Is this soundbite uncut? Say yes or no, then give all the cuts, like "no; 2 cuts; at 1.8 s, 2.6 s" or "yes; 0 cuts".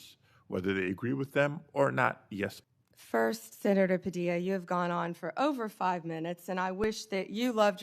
no; 1 cut; at 2.6 s